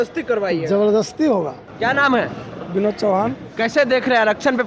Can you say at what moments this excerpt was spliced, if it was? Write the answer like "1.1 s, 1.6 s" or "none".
none